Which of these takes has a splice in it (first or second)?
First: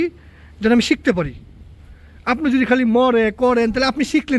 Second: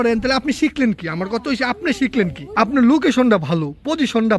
second